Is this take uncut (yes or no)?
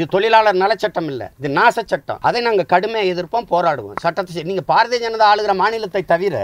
no